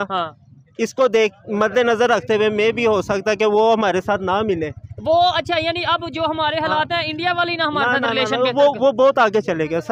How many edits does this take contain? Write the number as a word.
zero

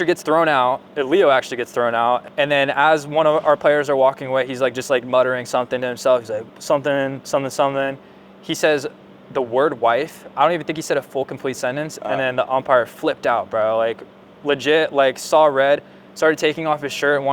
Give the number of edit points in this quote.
two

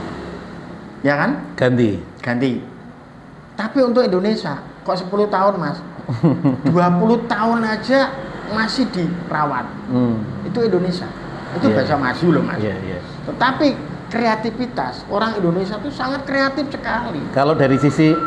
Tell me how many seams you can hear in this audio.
zero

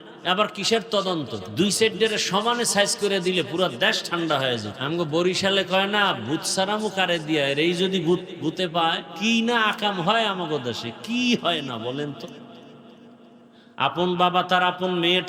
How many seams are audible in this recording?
three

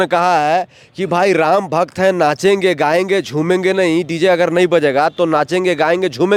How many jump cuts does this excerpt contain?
zero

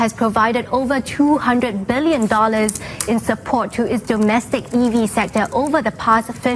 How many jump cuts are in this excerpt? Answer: zero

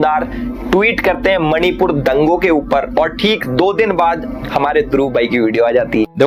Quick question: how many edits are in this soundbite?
zero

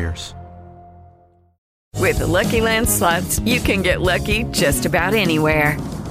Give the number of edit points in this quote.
one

